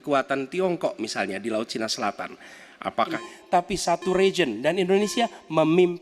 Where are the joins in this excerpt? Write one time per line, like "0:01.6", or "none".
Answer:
0:03.2